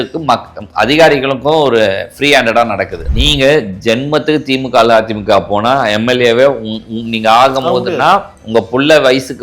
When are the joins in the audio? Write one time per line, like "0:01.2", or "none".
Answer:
0:03.0